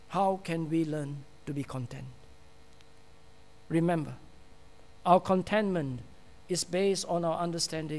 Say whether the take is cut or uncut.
uncut